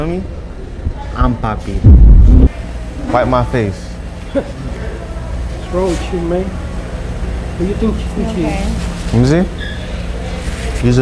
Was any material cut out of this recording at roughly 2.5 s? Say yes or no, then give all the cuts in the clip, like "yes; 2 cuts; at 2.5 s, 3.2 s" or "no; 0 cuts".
yes; 1 cut; at 2.5 s